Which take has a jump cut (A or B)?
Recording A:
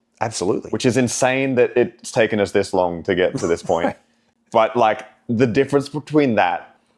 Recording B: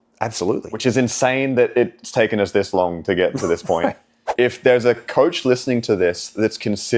B